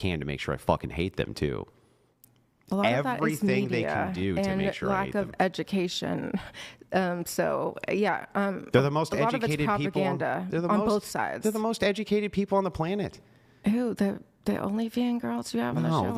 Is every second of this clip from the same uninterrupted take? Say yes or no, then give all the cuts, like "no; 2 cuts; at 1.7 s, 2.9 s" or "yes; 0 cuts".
yes; 0 cuts